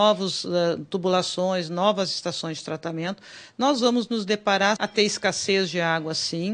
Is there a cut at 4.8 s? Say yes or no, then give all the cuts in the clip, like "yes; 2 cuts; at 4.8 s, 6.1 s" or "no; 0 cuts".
yes; 1 cut; at 4.8 s